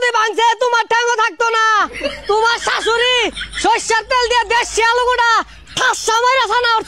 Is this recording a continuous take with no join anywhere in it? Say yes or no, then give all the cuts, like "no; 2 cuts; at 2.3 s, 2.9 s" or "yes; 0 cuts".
yes; 0 cuts